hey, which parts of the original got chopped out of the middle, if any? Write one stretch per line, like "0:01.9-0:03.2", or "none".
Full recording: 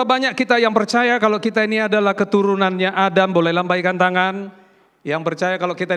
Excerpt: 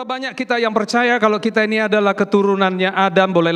none